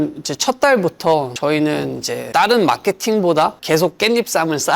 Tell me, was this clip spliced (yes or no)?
yes